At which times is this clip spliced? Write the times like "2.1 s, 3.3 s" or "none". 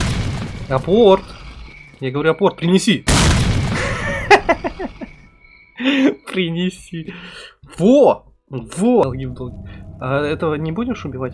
9.0 s